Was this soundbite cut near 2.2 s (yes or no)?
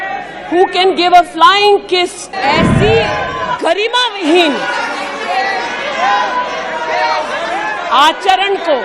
yes